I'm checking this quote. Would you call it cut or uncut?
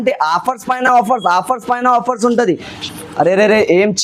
cut